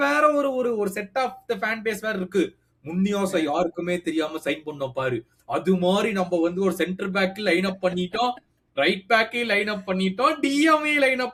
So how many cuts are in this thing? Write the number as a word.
zero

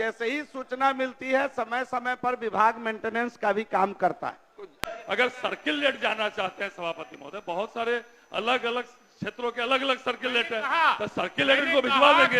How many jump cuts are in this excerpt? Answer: one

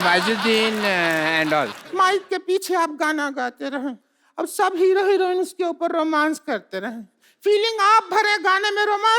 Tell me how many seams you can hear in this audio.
one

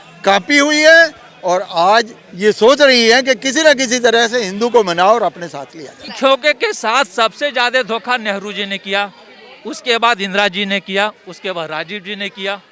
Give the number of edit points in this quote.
one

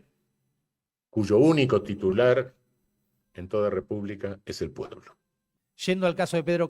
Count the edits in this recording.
one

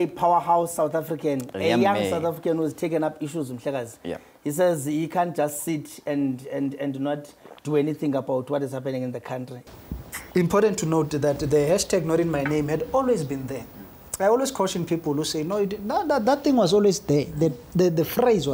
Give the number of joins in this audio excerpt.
one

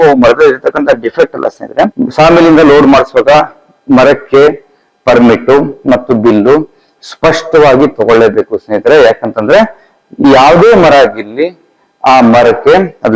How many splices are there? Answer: one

